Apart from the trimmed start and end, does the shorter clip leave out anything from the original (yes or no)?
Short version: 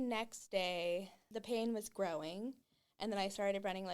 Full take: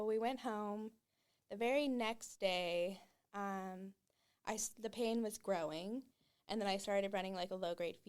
yes